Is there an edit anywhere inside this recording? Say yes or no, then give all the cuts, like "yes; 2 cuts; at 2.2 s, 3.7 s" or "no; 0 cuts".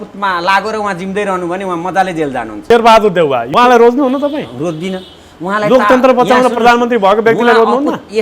yes; 2 cuts; at 2.7 s, 3.5 s